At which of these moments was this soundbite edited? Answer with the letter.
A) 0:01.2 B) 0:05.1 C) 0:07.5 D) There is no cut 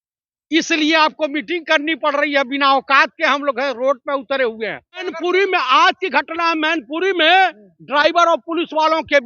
B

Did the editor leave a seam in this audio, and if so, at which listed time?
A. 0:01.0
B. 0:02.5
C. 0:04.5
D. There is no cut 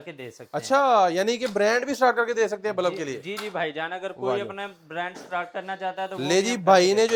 D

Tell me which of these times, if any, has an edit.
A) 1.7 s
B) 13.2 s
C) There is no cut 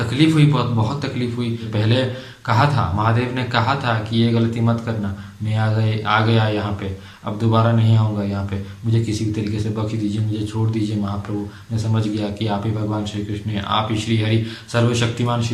A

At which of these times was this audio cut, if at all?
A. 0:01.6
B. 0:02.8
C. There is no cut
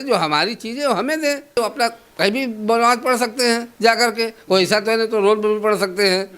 A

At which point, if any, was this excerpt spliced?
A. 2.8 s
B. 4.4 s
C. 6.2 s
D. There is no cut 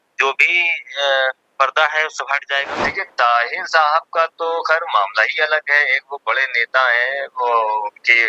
A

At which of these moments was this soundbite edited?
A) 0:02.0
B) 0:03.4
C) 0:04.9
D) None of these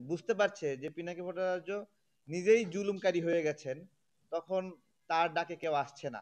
D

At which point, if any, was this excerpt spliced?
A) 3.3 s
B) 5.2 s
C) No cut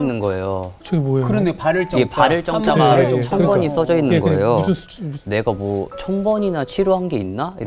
B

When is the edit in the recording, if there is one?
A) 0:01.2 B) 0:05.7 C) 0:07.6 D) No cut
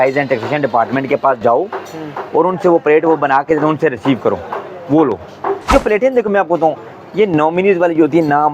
B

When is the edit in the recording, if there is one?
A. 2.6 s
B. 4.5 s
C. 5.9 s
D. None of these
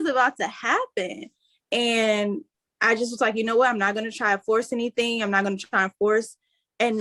D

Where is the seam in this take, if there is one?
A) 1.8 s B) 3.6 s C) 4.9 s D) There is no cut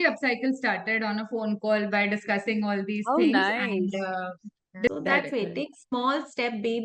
C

